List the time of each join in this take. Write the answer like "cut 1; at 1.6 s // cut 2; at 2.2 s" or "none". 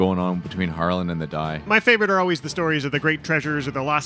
cut 1; at 1.7 s